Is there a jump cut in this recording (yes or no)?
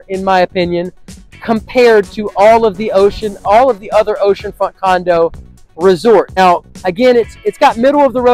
yes